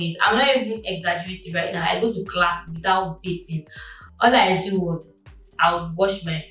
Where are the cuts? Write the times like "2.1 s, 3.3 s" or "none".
none